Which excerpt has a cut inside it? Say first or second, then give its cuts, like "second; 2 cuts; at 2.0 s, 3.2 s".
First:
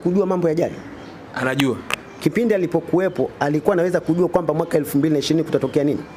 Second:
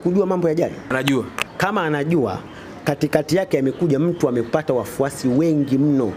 second; 1 cut; at 1.3 s